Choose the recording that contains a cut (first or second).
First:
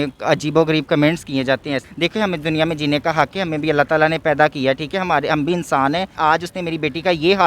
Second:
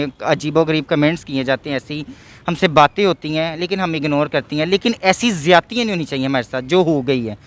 first